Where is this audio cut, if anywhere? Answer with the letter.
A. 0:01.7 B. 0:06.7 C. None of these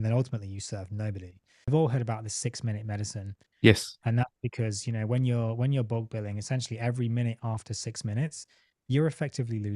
A